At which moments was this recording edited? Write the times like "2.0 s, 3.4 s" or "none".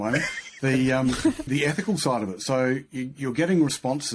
1.5 s

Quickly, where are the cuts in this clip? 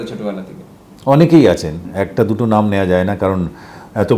none

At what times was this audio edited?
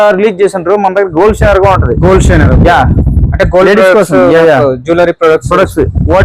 none

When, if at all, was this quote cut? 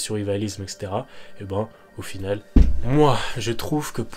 2.5 s

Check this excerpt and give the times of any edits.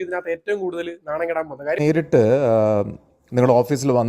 1.8 s

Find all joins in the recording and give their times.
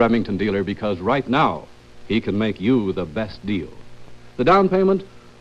none

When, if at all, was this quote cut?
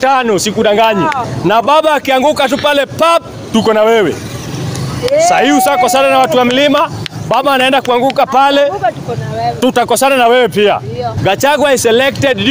1.3 s, 11.1 s

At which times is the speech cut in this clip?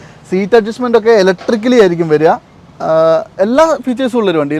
none

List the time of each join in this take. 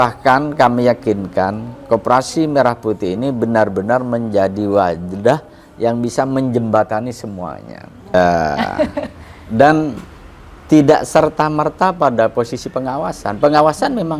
8.1 s

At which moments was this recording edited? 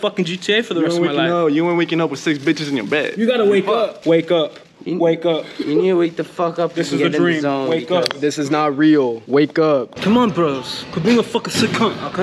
9.9 s

